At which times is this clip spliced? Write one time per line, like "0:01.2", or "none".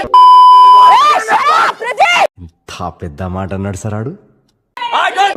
0:00.9